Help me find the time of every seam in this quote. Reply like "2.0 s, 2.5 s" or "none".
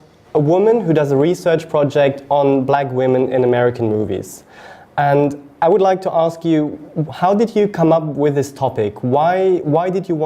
5.7 s